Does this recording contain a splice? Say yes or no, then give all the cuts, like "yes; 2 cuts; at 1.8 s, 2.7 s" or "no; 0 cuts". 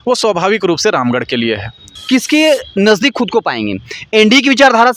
yes; 1 cut; at 2.0 s